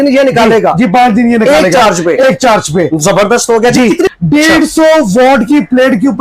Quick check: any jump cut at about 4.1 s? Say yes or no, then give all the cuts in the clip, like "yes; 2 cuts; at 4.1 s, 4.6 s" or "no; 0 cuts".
yes; 1 cut; at 4.1 s